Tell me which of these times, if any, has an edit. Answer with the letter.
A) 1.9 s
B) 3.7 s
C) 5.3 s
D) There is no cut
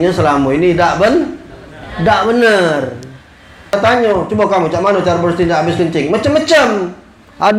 B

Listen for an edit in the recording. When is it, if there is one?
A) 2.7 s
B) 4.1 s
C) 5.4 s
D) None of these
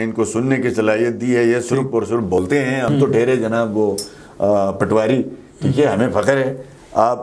A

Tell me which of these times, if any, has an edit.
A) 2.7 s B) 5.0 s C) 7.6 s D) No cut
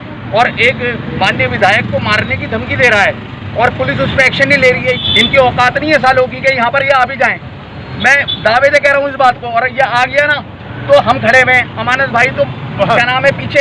B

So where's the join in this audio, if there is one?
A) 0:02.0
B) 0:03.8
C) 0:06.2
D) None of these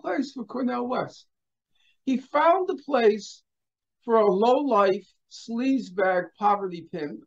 D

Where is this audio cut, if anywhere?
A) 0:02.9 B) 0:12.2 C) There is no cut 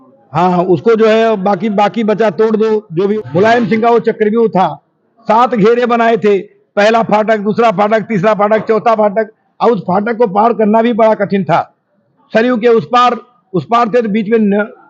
A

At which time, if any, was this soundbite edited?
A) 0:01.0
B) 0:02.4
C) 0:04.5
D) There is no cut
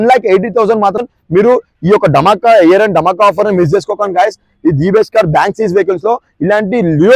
A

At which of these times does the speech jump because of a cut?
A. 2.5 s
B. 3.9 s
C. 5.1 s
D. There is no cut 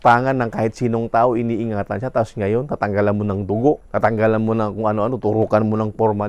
B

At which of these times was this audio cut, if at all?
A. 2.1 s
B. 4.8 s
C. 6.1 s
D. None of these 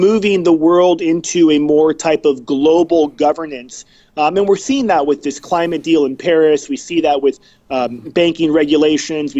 D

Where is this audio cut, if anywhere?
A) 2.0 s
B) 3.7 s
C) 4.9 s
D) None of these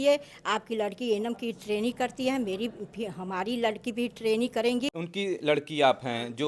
C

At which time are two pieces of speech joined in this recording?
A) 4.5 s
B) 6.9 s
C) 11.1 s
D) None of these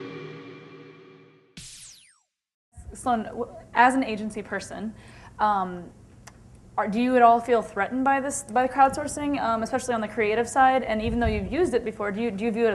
D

